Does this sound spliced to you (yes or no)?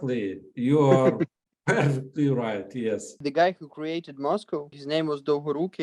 no